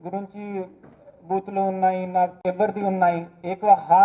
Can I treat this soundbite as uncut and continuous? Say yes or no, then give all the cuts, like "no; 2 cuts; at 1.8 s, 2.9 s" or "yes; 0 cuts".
no; 1 cut; at 2.3 s